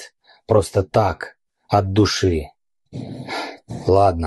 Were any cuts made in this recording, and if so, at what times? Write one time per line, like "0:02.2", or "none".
none